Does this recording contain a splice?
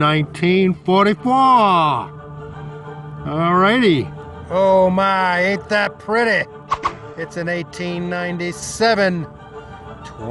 yes; 1 cut; at 4.2 s

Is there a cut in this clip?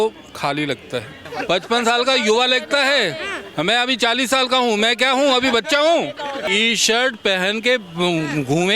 yes; 2 cuts; at 1.2 s, 6.4 s

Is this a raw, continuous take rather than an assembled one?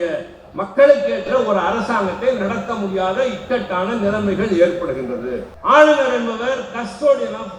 no; 1 cut; at 5.5 s

